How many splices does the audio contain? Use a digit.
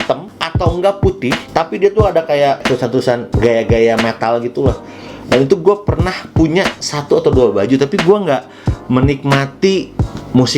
0